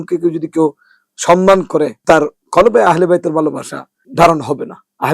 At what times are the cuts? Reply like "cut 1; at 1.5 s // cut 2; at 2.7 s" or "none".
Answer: cut 1; at 2.0 s // cut 2; at 4.0 s